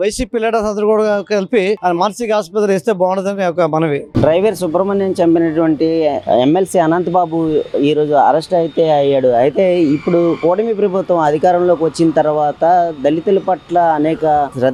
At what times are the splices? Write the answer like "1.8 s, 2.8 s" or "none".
none